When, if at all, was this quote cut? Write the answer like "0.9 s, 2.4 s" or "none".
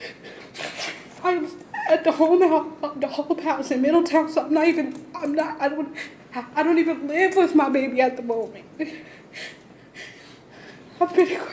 none